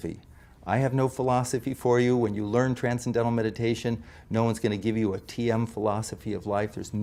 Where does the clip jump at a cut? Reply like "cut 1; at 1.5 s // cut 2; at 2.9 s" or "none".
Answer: none